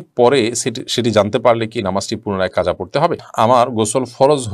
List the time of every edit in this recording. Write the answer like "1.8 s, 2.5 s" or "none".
3.2 s